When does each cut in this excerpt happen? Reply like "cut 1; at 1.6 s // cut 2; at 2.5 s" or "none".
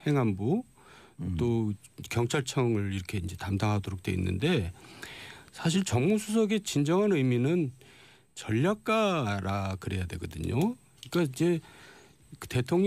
cut 1; at 8.0 s